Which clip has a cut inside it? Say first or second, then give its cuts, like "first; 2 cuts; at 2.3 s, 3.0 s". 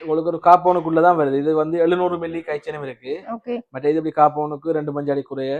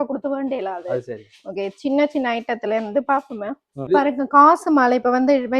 second; 1 cut; at 3.9 s